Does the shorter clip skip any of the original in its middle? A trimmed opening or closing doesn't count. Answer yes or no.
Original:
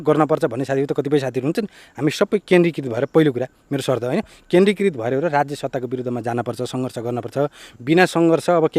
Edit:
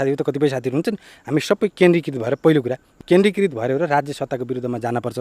yes